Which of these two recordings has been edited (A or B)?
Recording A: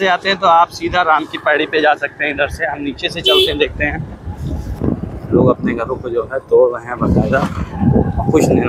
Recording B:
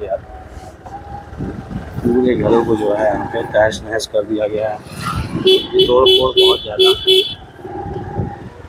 A